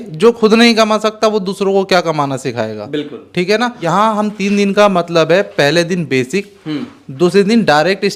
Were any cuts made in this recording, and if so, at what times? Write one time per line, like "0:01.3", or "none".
0:03.8